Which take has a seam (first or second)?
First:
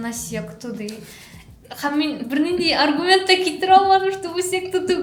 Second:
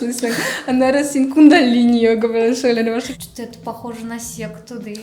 second